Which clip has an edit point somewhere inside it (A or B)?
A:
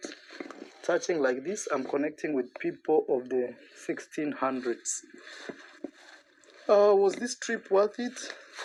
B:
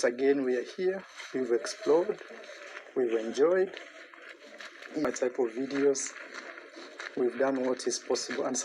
B